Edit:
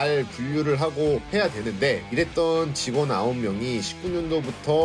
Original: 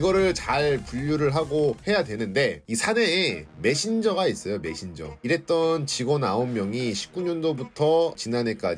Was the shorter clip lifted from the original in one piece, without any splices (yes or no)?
no